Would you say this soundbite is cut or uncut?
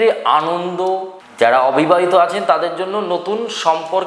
cut